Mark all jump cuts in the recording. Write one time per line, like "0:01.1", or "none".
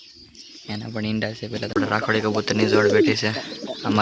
0:01.8